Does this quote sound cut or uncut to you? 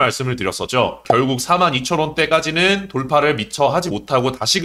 cut